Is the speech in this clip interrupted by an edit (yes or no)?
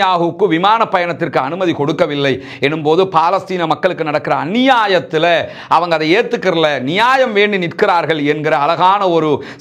no